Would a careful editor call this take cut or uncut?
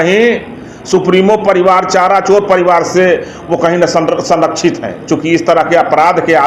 uncut